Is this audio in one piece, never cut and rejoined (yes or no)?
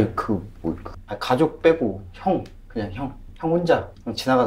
no